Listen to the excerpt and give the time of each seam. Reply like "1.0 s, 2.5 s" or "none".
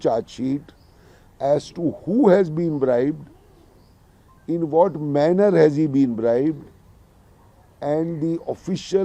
none